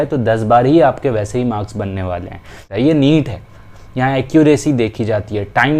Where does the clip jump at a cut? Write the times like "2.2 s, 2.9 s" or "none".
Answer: 2.6 s